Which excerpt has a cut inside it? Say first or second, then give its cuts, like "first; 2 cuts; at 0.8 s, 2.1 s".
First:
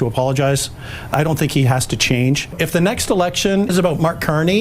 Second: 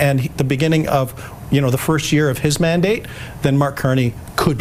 first; 2 cuts; at 2.5 s, 3.7 s